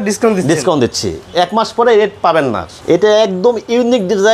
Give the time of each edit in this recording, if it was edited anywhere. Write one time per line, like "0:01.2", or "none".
0:02.7